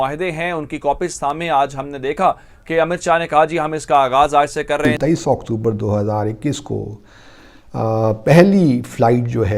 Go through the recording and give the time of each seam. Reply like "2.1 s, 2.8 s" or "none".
4.9 s